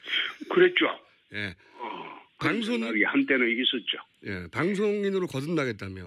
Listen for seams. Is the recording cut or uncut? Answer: cut